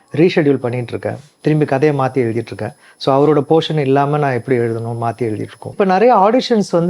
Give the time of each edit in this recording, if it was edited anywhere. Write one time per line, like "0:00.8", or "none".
0:05.7